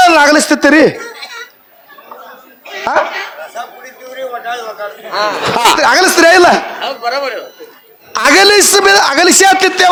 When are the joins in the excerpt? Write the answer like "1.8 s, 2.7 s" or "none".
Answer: none